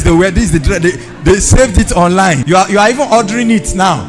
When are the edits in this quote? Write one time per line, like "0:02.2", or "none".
0:02.4